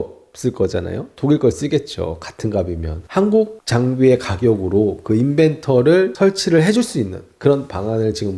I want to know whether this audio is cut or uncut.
cut